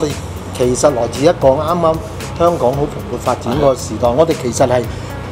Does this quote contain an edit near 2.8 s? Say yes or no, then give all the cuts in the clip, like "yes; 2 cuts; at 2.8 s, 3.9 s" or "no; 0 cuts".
no; 0 cuts